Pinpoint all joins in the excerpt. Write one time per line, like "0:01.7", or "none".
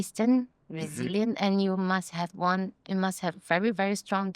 none